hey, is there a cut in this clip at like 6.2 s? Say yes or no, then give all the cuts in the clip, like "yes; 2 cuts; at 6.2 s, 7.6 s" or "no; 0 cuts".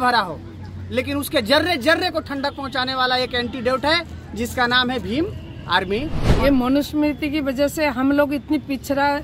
yes; 1 cut; at 6.2 s